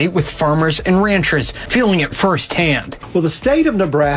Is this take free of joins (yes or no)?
no